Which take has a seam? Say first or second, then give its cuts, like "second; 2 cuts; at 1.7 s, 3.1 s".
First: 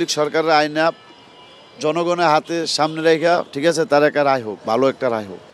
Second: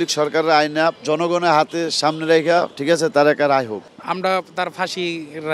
second; 2 cuts; at 1.0 s, 3.8 s